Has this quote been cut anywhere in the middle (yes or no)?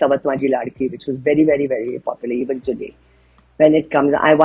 no